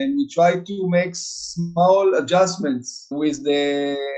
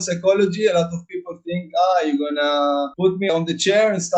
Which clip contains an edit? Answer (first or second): first